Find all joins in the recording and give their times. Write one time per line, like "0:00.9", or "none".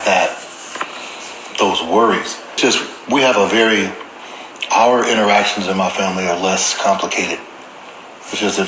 0:02.6